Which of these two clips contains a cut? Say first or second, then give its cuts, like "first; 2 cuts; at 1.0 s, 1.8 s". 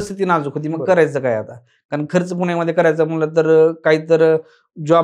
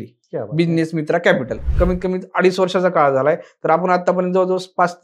second; 1 cut; at 1.6 s